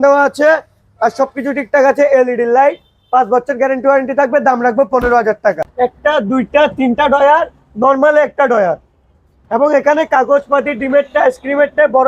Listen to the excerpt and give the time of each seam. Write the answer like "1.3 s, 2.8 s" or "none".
5.7 s